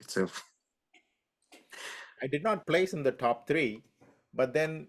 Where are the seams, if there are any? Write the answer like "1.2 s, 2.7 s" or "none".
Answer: 2.1 s

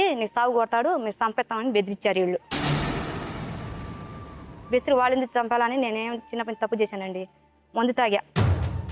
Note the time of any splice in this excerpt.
none

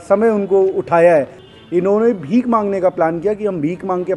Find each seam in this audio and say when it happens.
1.4 s

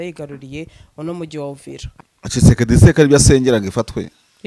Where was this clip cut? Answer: 1.9 s

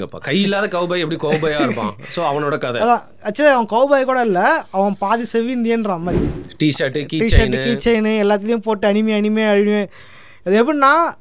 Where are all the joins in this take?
6.2 s

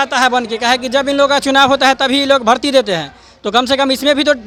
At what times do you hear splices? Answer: none

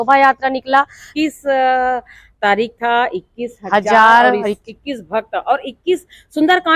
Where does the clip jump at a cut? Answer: 1.0 s

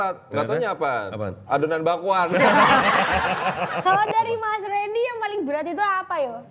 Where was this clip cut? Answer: 3.8 s

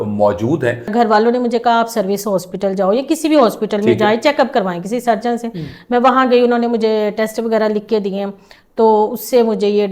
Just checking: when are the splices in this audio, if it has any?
0.9 s

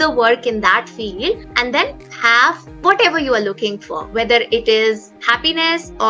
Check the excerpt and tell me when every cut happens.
5.2 s

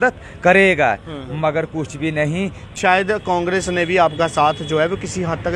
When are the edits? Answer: 2.7 s

